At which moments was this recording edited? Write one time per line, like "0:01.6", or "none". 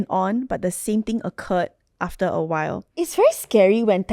0:03.0

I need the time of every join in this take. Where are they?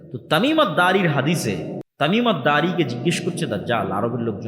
0:01.8

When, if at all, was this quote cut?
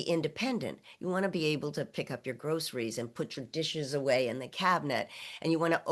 none

